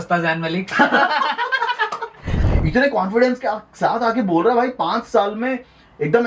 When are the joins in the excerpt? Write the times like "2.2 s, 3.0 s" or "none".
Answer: 2.4 s

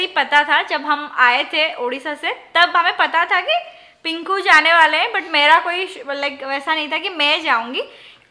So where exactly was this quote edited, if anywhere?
none

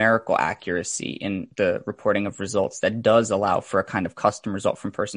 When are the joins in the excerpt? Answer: 1.5 s

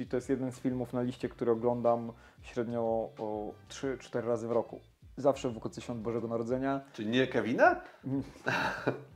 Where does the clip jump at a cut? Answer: none

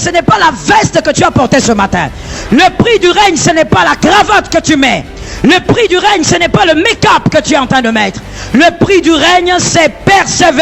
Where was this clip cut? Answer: none

